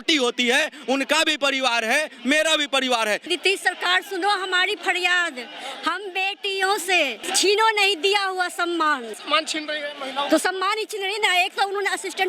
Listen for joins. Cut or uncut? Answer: cut